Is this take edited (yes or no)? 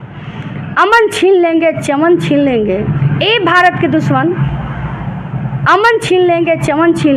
no